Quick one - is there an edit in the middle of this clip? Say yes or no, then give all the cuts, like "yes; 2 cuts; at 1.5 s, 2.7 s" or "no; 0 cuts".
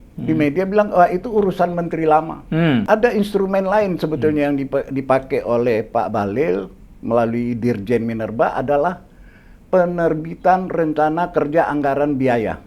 yes; 1 cut; at 2.8 s